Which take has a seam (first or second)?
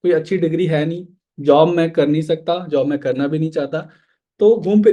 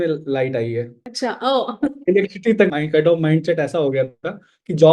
second